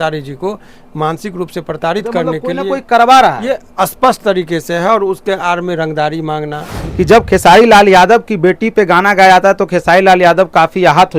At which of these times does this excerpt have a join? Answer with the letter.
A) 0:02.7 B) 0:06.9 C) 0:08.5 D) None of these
B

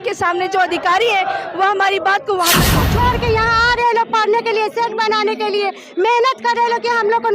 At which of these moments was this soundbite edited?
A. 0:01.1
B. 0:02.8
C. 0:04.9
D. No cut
B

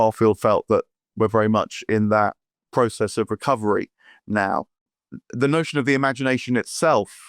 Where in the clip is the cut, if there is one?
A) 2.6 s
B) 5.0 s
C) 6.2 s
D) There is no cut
B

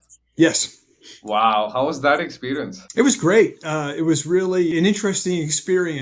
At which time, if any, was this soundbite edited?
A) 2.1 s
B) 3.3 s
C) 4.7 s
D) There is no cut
C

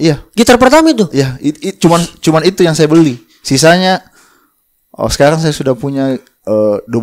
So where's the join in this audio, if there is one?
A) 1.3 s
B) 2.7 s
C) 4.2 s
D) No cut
D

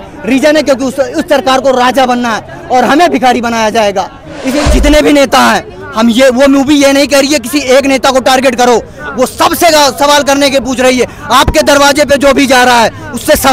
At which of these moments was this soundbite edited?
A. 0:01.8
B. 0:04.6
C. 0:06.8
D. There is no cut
B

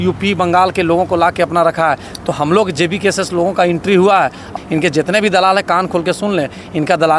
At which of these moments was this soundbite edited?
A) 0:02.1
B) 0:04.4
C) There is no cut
B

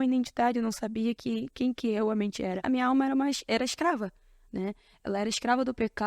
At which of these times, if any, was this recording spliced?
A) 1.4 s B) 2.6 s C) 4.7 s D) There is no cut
B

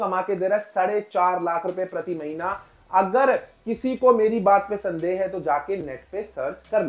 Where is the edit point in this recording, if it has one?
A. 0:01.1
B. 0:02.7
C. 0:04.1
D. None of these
D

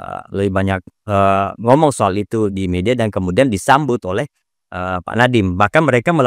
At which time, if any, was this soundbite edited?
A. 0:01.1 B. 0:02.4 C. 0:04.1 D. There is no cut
D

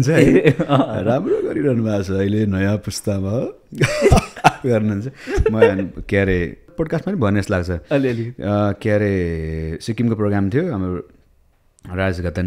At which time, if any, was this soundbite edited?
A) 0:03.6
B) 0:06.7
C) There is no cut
B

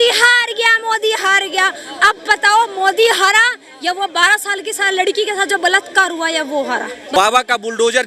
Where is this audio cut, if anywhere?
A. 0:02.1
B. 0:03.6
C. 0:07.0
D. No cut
C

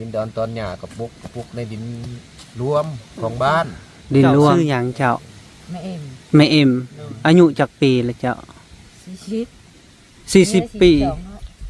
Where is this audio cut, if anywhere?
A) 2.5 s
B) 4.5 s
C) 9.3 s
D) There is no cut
B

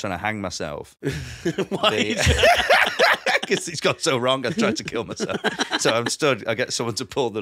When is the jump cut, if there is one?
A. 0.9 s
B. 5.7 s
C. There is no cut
C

